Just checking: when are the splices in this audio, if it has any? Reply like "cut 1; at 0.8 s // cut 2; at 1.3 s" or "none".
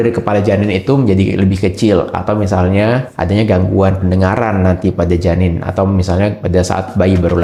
none